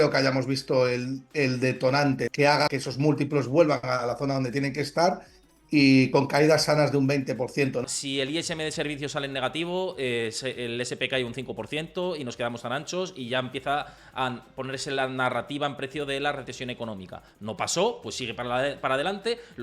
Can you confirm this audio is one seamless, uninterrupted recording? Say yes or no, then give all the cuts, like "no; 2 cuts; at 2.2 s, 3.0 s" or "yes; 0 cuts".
no; 2 cuts; at 2.4 s, 7.8 s